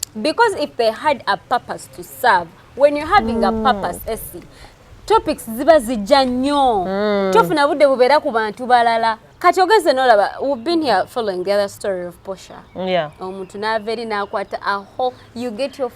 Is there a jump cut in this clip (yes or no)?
yes